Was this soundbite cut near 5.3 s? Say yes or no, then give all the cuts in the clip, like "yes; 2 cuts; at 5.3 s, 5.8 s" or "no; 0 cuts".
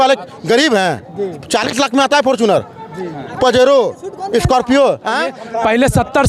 yes; 1 cut; at 5.3 s